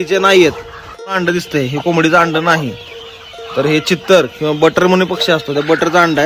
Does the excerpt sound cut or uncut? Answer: cut